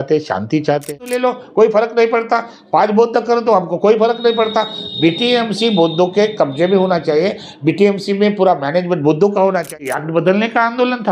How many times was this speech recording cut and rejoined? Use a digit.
2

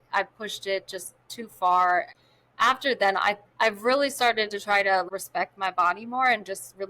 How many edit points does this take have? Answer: 2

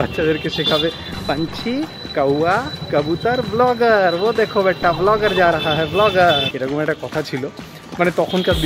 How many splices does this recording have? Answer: 1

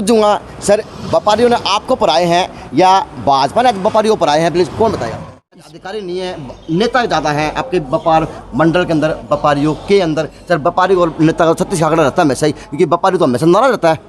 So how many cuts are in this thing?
1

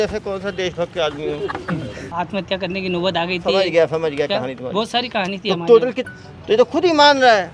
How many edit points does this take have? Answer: 2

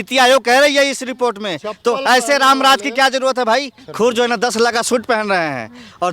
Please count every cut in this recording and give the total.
1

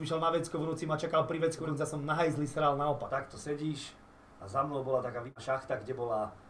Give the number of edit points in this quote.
3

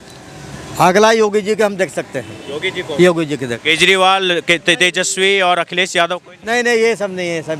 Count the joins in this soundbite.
0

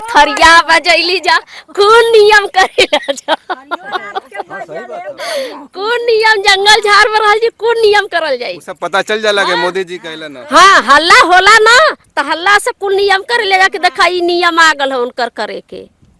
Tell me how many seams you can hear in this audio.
0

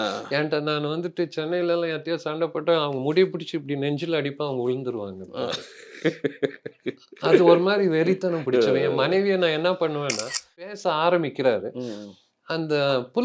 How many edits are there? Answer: 1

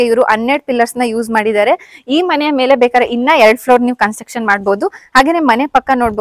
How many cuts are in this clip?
0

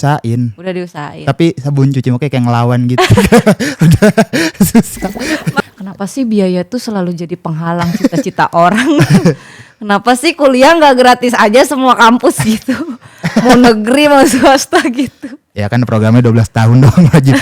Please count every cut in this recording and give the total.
1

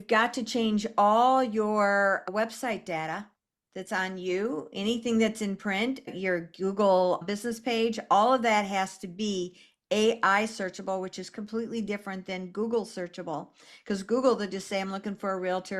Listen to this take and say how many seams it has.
3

